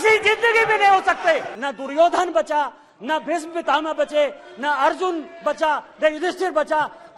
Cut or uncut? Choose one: cut